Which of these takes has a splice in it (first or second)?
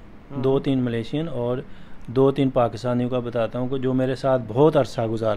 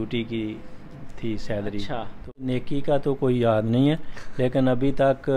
second